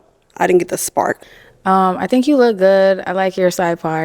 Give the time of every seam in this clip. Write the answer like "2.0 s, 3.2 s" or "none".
1.2 s